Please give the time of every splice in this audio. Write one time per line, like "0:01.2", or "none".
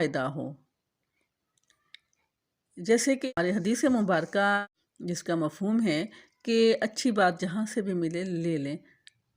0:03.2
0:04.7